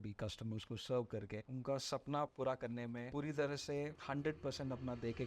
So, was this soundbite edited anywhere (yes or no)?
yes